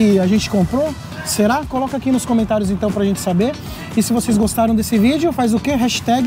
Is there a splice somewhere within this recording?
no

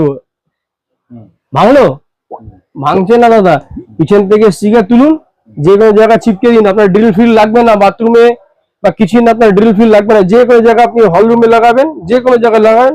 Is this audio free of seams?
yes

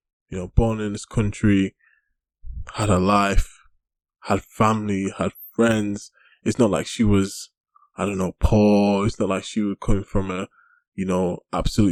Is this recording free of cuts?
yes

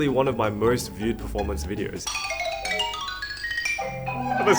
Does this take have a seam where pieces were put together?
yes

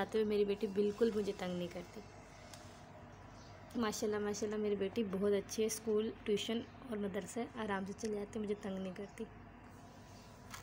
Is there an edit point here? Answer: no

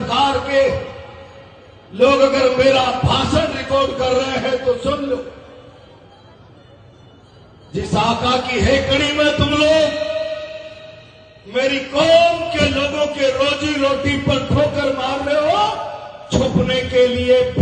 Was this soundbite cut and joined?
no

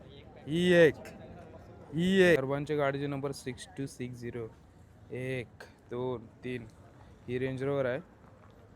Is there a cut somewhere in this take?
yes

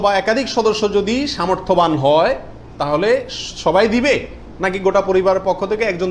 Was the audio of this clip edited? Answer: no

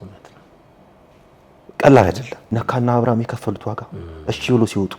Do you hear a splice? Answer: yes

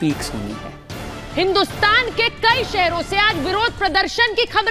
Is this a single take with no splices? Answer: no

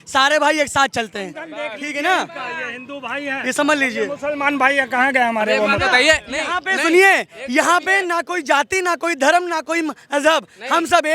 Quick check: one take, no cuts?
yes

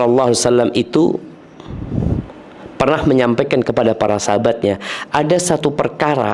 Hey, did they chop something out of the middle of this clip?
no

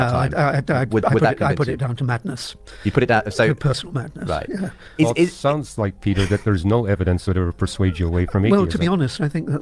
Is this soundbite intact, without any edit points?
yes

